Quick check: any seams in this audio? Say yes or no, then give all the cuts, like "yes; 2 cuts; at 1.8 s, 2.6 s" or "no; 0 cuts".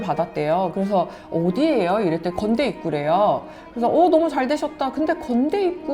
no; 0 cuts